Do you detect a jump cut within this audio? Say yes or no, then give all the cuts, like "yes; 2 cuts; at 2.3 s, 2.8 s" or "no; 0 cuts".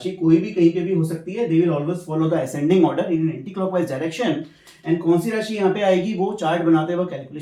no; 0 cuts